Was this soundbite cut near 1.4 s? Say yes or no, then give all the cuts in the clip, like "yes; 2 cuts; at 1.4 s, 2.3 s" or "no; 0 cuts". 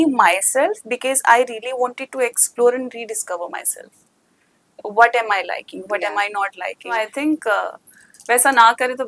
no; 1 cut; at 6.9 s